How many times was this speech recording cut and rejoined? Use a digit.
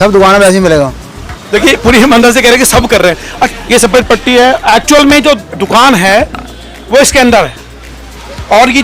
1